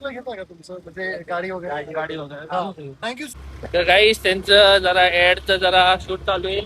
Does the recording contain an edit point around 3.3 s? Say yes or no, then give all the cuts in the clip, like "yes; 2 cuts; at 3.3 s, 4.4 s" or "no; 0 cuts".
yes; 1 cut; at 3.3 s